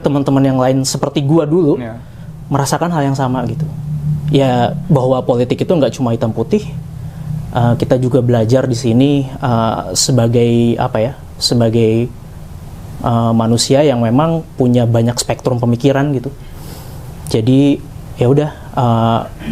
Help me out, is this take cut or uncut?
uncut